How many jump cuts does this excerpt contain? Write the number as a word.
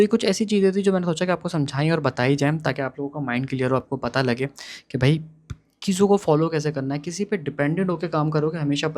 zero